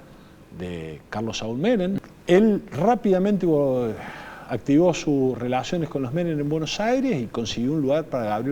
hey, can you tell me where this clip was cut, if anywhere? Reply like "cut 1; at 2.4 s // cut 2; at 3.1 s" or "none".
cut 1; at 2.0 s